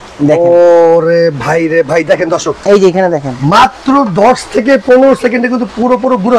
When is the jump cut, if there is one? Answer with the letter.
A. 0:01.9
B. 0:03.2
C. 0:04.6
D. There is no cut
D